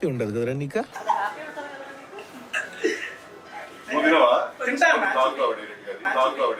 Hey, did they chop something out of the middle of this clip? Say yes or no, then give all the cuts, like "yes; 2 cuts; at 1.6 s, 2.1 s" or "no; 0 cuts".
no; 0 cuts